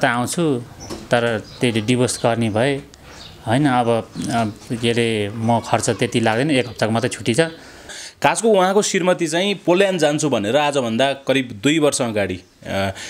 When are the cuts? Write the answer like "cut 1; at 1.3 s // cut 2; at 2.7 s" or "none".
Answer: cut 1; at 8.0 s